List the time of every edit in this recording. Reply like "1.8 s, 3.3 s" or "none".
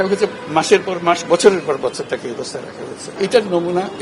3.0 s